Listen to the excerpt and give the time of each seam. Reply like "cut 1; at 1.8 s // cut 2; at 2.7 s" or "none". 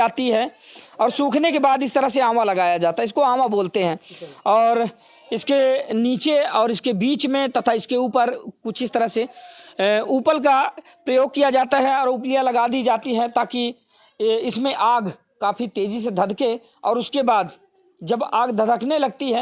none